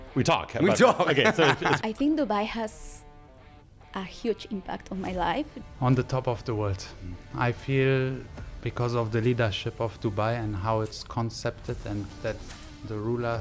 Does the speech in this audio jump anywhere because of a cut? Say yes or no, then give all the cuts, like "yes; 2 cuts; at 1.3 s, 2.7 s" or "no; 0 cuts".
yes; 2 cuts; at 1.8 s, 5.5 s